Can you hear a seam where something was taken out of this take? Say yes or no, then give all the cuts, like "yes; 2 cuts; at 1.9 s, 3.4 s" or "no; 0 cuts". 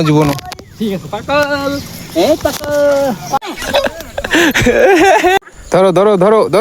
yes; 2 cuts; at 3.4 s, 5.4 s